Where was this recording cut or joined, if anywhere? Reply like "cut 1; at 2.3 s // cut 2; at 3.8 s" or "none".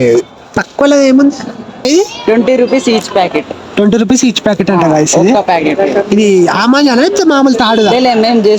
cut 1; at 1.9 s

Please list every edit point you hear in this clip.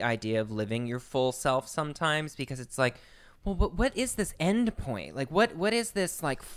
none

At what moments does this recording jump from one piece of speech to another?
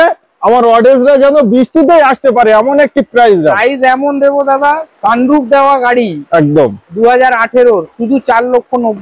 none

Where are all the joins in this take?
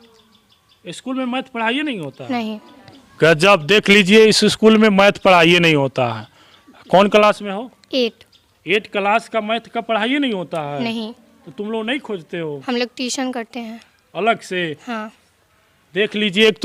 none

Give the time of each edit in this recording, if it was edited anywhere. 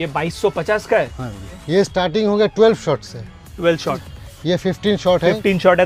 cut 1; at 1.6 s // cut 2; at 4.0 s

